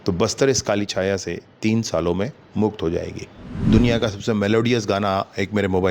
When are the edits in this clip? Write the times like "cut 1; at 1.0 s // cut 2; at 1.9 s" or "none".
cut 1; at 3.6 s